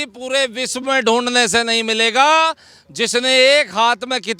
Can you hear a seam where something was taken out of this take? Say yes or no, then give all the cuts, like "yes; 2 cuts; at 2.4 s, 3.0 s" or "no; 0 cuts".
no; 0 cuts